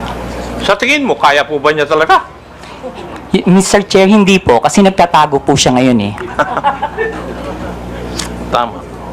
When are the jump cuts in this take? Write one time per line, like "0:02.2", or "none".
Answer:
none